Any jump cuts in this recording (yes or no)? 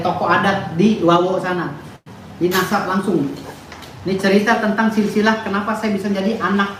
no